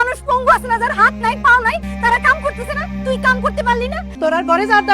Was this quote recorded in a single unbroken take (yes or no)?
no